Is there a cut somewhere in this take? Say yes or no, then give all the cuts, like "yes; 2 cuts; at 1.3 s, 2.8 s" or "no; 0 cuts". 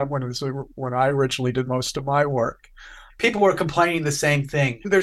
no; 0 cuts